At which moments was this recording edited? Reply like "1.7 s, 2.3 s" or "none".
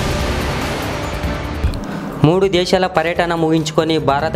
1.5 s